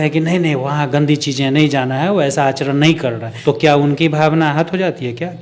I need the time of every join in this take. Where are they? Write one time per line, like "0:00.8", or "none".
0:03.3